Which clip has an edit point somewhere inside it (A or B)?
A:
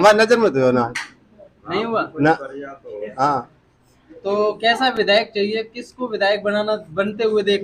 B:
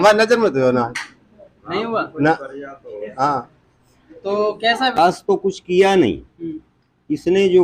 B